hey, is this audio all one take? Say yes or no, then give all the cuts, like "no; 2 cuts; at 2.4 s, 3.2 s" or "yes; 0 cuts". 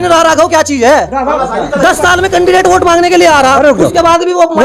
yes; 0 cuts